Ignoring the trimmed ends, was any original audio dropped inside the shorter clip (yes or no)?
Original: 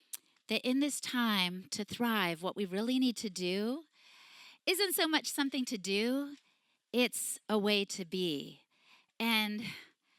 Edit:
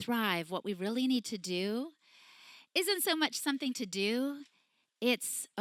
no